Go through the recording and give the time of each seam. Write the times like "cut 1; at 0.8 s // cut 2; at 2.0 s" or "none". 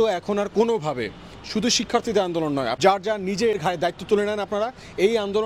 cut 1; at 2.7 s // cut 2; at 3.6 s